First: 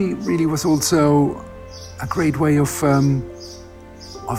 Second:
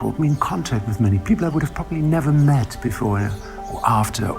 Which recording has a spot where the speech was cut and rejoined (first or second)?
second